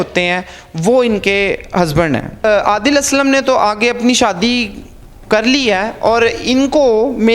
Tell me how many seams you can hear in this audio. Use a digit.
1